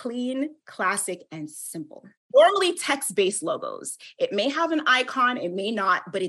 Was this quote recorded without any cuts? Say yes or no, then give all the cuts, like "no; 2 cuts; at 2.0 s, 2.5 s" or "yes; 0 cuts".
no; 1 cut; at 2.2 s